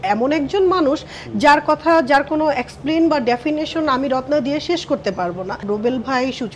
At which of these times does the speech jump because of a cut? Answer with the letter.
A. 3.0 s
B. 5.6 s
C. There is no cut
B